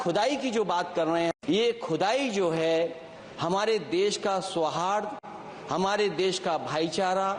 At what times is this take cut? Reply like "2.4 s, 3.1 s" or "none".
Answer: 1.4 s